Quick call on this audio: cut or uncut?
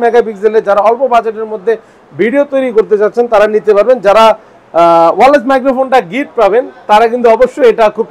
uncut